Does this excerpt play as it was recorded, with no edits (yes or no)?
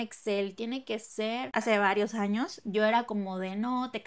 no